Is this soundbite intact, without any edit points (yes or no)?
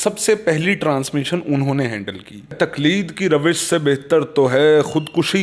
no